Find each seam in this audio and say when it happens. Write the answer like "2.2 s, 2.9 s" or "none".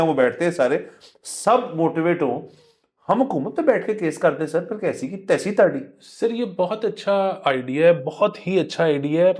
none